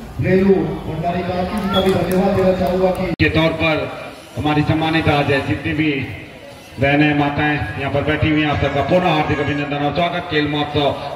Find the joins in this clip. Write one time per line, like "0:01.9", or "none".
none